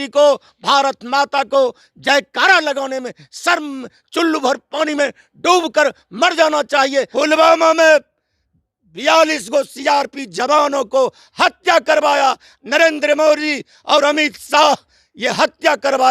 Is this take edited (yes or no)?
yes